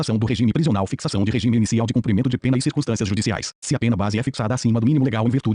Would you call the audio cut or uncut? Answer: uncut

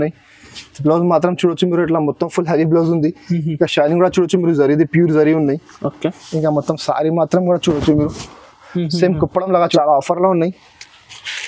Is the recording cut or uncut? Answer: cut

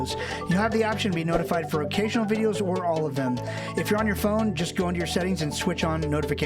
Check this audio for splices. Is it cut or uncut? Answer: uncut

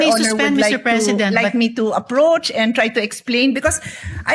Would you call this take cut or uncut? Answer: uncut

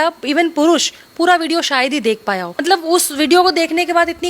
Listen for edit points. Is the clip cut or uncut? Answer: cut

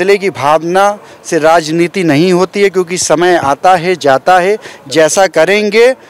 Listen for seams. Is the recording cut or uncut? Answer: uncut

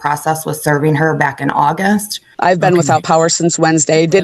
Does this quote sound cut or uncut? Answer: cut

